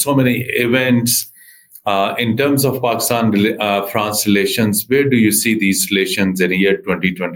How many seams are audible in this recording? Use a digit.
0